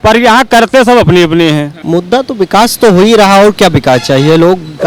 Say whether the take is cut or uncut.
cut